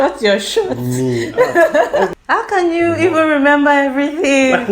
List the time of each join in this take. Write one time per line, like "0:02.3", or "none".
0:02.1

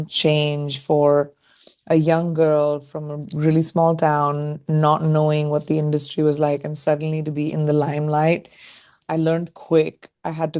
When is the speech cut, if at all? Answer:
0:08.9

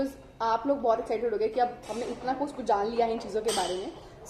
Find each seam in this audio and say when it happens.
none

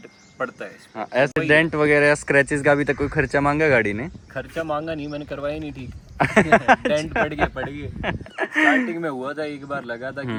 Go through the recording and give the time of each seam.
none

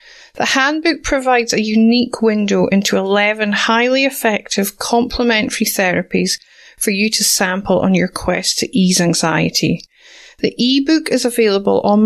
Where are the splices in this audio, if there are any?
none

